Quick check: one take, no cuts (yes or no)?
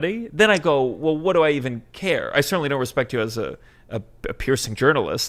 yes